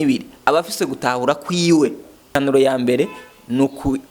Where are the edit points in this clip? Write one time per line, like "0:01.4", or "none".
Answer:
0:02.3